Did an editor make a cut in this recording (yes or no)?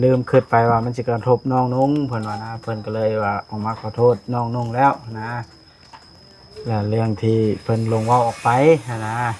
no